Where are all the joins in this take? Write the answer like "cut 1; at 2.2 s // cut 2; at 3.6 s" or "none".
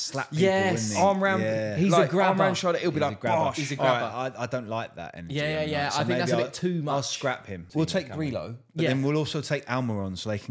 cut 1; at 7.6 s